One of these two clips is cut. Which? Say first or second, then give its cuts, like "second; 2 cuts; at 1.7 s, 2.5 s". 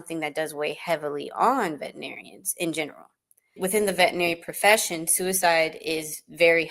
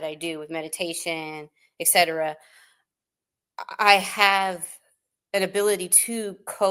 first; 1 cut; at 3.6 s